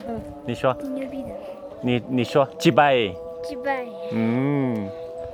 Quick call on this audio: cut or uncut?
uncut